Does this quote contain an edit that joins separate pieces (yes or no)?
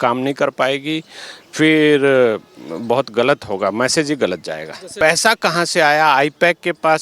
yes